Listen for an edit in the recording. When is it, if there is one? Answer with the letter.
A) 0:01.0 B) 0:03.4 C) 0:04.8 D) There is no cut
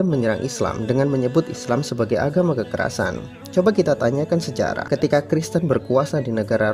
C